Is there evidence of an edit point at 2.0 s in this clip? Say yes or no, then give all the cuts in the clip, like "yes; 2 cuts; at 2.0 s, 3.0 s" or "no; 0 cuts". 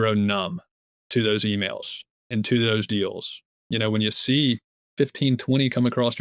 no; 1 cut; at 4.8 s